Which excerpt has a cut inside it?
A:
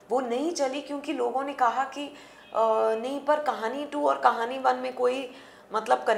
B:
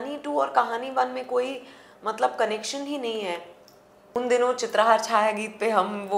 B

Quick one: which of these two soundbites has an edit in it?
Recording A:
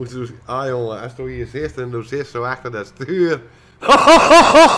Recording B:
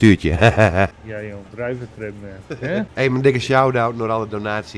B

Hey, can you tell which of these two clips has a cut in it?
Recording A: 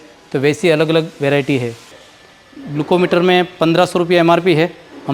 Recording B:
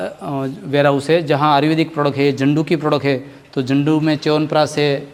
A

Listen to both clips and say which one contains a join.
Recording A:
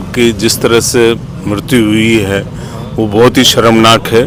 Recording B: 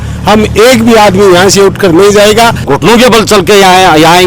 B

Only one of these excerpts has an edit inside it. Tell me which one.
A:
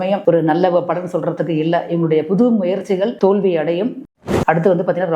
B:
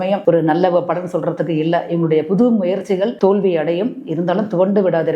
A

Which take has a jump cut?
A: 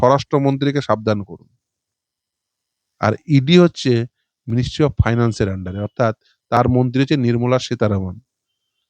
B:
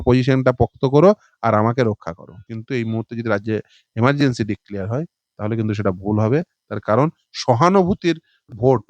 B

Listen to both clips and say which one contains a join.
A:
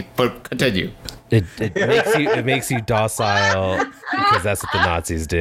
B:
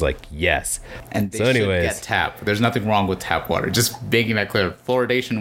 B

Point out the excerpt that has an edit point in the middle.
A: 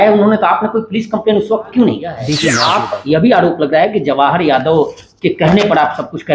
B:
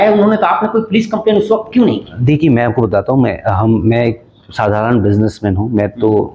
A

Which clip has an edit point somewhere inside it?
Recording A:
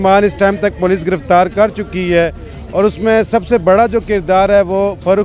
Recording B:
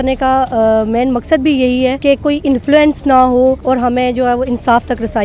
B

